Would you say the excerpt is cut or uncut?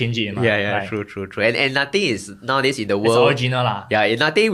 uncut